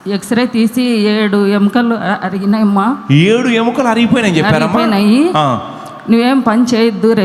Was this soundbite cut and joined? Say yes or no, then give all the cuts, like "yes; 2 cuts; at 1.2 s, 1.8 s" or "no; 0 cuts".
no; 0 cuts